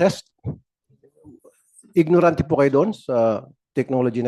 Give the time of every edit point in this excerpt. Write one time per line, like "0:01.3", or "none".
none